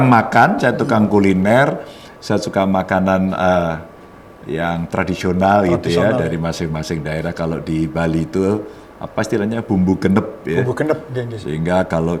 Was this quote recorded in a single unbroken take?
yes; 0 cuts

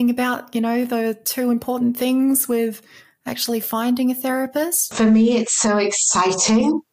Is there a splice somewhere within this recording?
yes; 1 cut; at 4.9 s

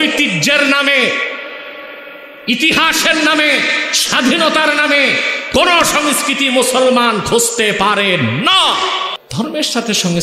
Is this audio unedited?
no; 1 cut; at 9.1 s

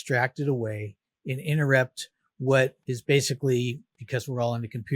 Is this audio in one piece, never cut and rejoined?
no; 2 cuts; at 2.9 s, 3.9 s

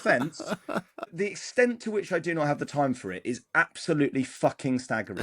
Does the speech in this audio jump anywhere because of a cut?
yes; 1 cut; at 1.1 s

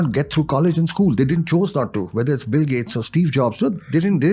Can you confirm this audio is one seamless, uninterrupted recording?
yes; 0 cuts

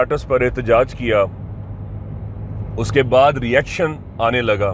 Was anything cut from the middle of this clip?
no; 0 cuts

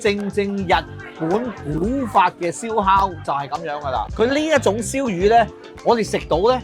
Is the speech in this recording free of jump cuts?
no; 1 cut; at 4.0 s

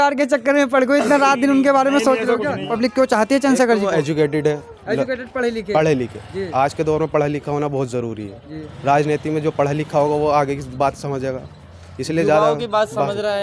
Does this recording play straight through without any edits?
no; 1 cut; at 2.7 s

